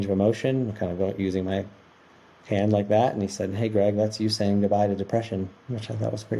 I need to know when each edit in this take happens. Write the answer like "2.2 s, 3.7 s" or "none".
none

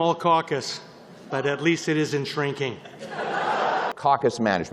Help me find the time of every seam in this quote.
3.8 s

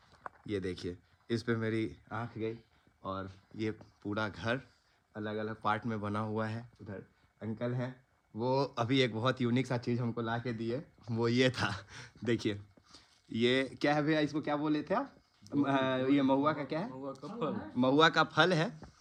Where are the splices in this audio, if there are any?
none

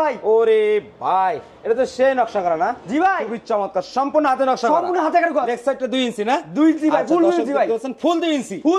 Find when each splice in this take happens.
none

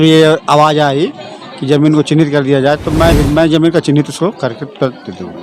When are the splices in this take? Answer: 3.1 s

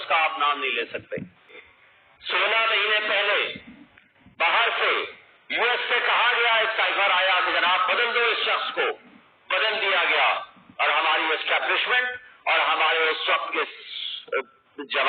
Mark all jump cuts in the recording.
1.6 s

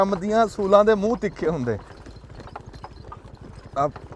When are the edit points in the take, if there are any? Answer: none

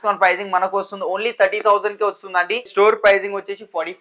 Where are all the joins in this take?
2.7 s

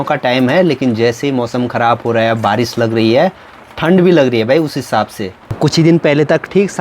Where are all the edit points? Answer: none

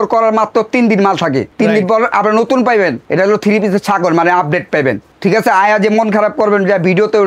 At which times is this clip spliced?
1.5 s, 3.0 s, 5.1 s

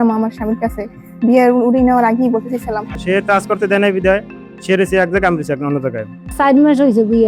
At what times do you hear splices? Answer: 3.0 s, 6.2 s

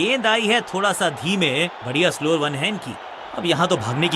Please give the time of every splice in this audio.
3.0 s

